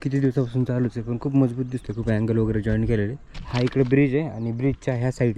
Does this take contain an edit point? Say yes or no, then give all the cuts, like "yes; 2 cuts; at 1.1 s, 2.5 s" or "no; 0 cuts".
yes; 1 cut; at 3.4 s